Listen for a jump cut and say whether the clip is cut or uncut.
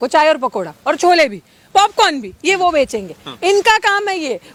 uncut